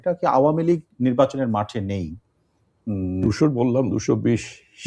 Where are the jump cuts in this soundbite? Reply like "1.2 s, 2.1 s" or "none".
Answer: 3.2 s